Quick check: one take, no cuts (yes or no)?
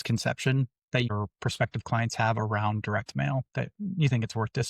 no